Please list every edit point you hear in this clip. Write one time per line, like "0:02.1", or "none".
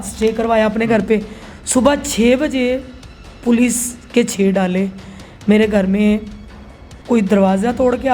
none